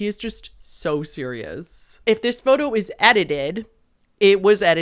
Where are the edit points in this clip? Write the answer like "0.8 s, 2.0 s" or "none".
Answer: 1.9 s